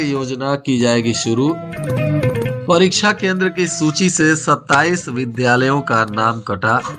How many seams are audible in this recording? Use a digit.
0